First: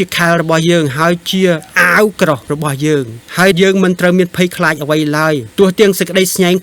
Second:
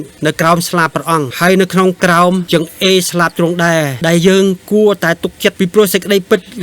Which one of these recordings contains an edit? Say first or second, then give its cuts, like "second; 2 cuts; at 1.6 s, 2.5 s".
second; 3 cuts; at 1.3 s, 2.4 s, 3.9 s